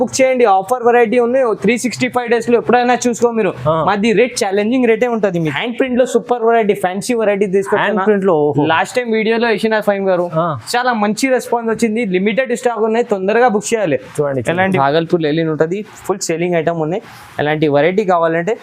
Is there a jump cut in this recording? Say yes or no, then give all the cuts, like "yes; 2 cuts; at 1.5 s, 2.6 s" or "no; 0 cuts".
yes; 2 cuts; at 5.6 s, 14.8 s